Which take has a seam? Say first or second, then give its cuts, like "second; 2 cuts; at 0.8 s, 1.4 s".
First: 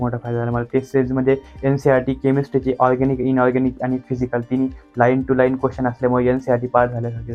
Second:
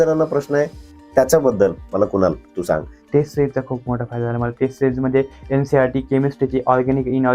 second; 1 cut; at 2.9 s